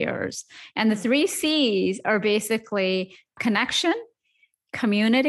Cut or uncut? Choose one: cut